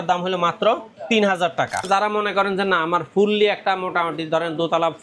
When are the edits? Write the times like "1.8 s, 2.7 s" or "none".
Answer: 1.9 s